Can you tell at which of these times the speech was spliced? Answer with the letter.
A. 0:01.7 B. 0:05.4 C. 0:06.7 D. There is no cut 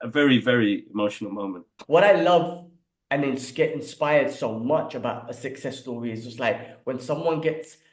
A